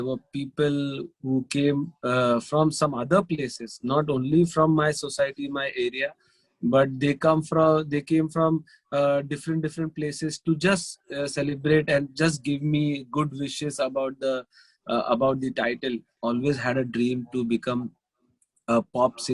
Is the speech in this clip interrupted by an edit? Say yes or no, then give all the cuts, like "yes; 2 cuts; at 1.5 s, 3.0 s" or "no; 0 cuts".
yes; 1 cut; at 16.1 s